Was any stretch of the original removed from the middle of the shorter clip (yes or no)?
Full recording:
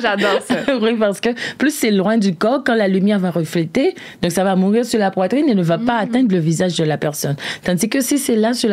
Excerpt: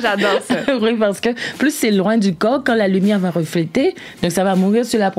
no